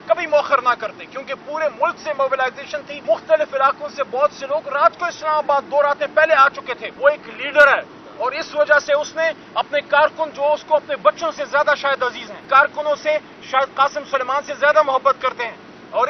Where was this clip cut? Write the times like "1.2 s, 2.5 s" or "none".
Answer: 2.9 s, 6.8 s, 12.4 s